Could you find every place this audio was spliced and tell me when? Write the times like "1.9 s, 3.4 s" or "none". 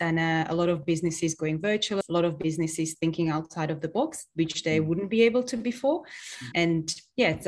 2.0 s